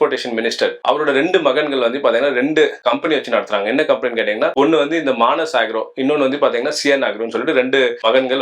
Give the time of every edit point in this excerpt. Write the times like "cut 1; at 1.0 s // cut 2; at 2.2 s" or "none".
none